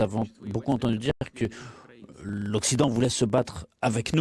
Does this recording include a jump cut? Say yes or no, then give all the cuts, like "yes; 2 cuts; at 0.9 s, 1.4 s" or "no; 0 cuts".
no; 0 cuts